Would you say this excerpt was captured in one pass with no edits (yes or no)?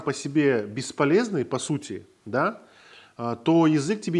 yes